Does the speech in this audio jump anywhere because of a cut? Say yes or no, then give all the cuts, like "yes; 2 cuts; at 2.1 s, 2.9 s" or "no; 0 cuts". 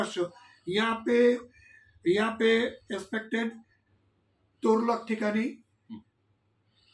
no; 0 cuts